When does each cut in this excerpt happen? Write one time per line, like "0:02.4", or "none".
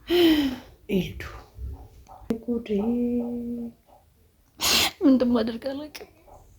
0:02.3